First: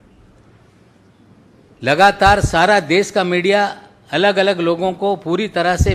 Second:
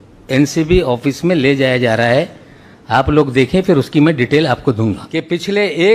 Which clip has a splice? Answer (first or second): second